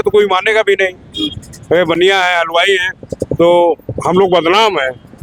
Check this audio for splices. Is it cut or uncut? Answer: uncut